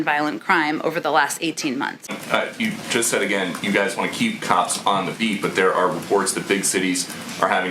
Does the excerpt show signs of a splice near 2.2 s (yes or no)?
yes